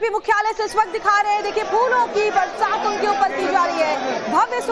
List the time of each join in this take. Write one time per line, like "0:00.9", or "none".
0:02.8